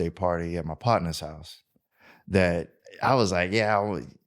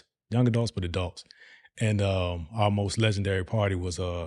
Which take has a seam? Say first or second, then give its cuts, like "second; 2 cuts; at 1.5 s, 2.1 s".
first; 1 cut; at 2.8 s